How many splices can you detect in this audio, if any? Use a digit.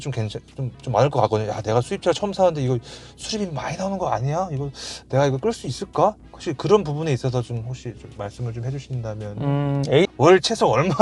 1